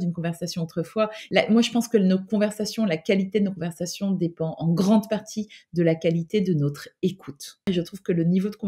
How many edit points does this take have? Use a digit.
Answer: 2